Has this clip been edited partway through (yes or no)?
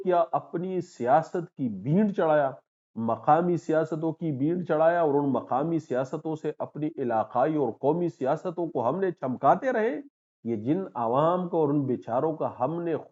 no